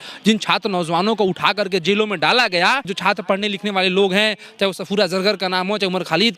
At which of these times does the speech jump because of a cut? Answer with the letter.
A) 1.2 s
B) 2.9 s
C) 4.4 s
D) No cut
B